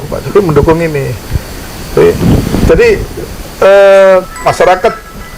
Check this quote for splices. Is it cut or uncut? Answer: cut